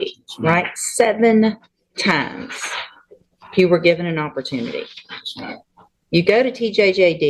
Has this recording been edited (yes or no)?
no